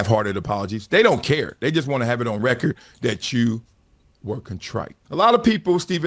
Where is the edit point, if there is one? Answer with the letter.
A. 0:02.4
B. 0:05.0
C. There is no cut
B